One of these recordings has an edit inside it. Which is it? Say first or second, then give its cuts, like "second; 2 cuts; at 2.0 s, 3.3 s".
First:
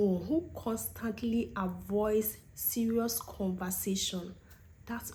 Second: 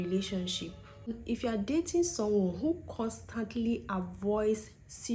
second; 1 cut; at 1.2 s